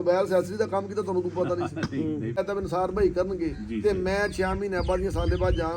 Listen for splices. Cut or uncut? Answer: cut